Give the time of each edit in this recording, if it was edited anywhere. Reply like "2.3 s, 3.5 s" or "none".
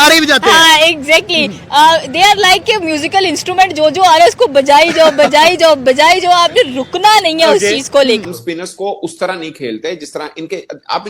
8.2 s